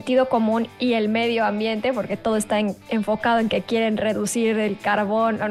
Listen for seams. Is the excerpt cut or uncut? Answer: uncut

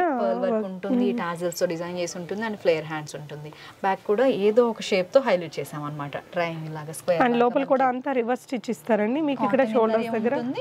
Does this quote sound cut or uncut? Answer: uncut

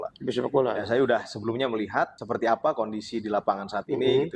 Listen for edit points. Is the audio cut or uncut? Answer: cut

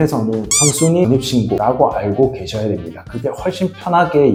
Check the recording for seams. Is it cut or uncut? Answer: uncut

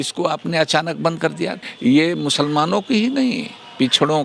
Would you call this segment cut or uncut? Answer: cut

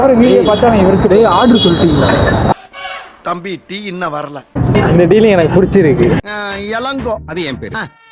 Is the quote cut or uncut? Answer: cut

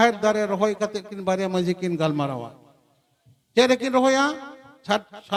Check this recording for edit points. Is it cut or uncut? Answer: uncut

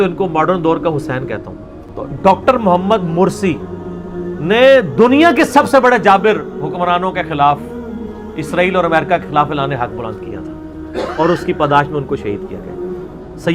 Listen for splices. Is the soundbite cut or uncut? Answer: cut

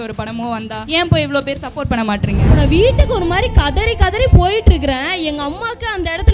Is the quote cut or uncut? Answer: cut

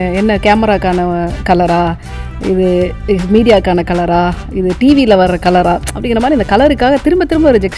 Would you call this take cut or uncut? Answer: uncut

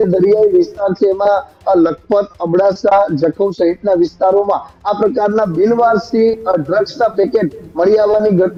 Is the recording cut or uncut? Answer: uncut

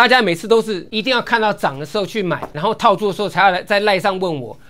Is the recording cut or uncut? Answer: cut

